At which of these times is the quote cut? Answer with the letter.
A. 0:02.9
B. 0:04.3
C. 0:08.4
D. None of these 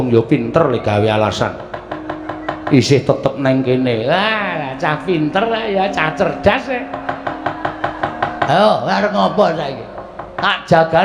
D